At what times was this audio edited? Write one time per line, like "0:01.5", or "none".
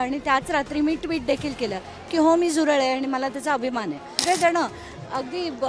0:04.2